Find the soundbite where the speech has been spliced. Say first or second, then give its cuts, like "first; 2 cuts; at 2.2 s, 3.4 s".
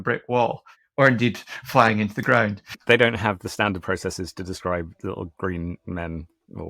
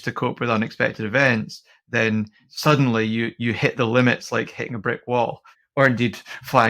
second; 1 cut; at 2.4 s